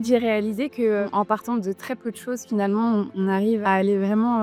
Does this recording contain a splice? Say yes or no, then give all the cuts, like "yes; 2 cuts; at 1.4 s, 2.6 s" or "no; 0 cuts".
no; 0 cuts